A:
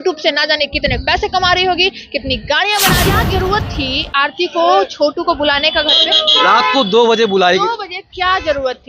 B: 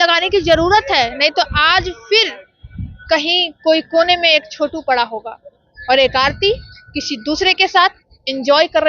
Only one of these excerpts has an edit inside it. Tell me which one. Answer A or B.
A